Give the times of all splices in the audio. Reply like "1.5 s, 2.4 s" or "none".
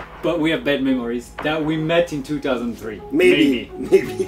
none